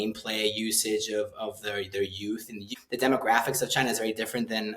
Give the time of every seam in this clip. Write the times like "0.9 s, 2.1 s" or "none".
2.7 s